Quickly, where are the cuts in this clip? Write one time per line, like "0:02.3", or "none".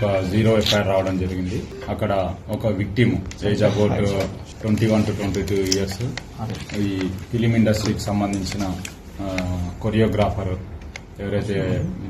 0:01.7
0:04.5